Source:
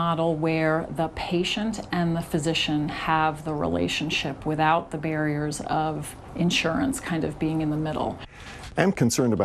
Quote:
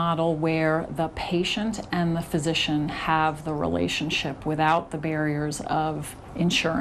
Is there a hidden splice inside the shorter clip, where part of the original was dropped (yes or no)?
no